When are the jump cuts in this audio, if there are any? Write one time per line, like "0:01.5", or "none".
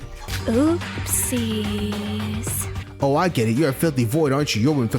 0:02.7